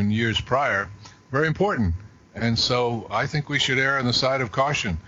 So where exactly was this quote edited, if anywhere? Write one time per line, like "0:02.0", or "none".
none